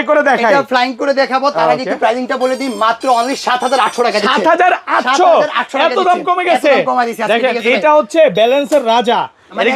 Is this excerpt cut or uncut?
uncut